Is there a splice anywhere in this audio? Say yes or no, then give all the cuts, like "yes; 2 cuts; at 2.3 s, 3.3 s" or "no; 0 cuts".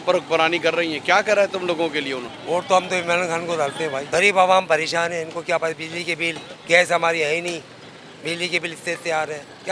yes; 2 cuts; at 2.3 s, 4.0 s